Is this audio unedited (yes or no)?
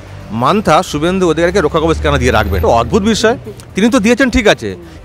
no